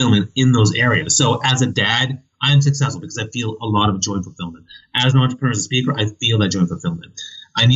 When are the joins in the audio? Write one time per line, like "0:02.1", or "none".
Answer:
none